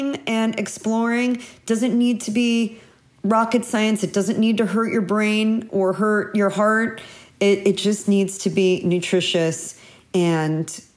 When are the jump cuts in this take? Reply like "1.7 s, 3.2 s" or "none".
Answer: none